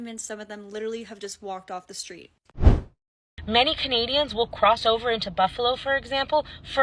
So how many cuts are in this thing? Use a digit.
1